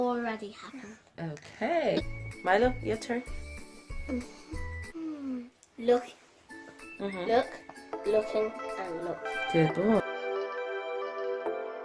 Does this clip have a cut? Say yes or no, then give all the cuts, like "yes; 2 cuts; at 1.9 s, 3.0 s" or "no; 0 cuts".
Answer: yes; 1 cut; at 10.1 s